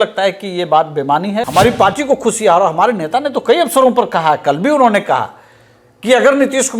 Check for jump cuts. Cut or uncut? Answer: cut